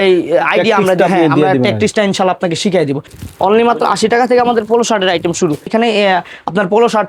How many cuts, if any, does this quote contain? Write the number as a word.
two